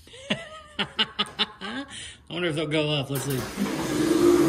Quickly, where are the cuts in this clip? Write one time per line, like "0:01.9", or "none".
none